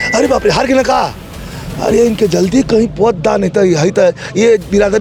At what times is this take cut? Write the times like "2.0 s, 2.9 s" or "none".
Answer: none